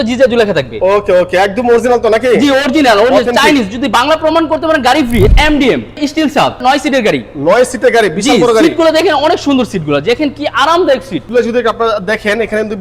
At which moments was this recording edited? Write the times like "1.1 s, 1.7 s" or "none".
5.3 s, 6.6 s, 11.2 s